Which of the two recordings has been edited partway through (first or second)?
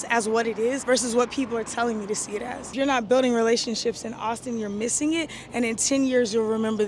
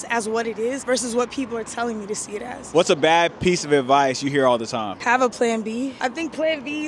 first